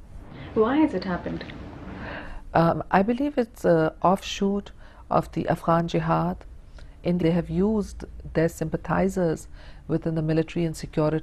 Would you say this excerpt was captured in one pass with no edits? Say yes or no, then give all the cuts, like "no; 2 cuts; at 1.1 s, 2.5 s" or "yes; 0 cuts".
yes; 0 cuts